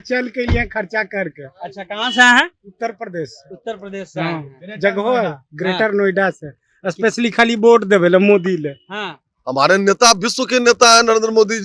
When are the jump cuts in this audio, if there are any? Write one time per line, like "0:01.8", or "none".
0:09.4